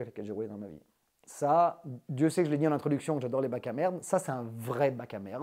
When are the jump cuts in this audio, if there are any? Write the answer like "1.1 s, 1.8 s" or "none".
none